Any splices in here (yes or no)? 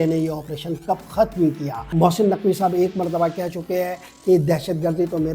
yes